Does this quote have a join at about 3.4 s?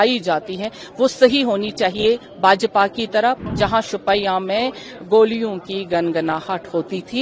yes; 1 cut; at 3.4 s

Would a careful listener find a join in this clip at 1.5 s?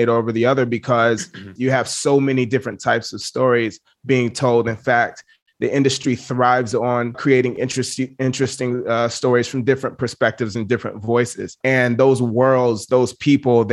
yes; 1 cut; at 1.5 s

